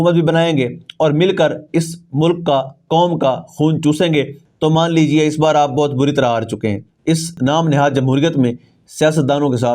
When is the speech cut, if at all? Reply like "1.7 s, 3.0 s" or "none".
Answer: 4.4 s, 7.3 s